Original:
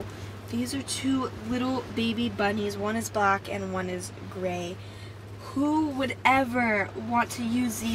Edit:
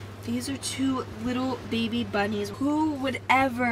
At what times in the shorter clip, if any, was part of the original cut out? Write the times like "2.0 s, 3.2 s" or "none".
2.5 s